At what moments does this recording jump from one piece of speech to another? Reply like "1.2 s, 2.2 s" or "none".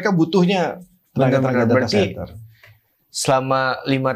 none